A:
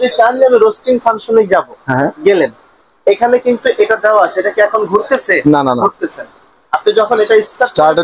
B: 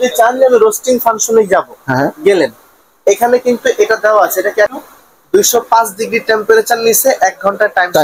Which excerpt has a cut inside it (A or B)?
B